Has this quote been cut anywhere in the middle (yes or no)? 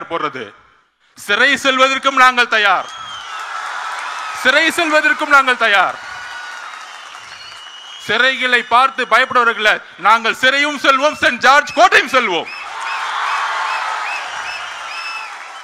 no